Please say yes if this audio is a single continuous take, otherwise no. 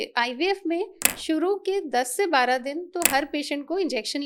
yes